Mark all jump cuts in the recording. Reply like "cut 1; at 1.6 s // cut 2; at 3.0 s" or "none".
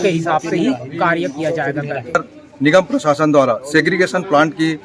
cut 1; at 2.2 s